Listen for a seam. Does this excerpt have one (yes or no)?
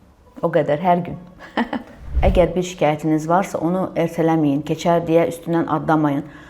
yes